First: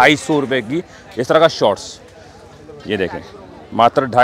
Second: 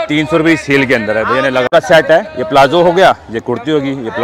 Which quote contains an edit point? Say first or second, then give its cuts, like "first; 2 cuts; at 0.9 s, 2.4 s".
second; 1 cut; at 1.7 s